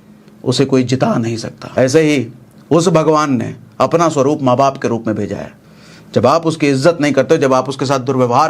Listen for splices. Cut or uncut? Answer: cut